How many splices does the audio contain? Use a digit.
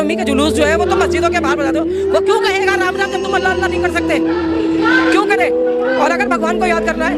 0